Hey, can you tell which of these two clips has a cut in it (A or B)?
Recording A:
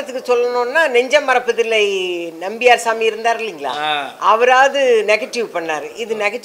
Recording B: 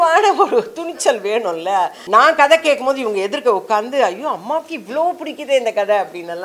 B